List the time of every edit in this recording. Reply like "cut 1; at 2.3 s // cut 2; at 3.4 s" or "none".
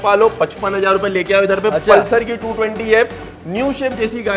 none